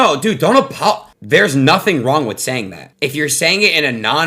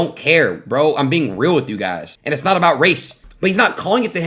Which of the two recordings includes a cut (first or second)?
first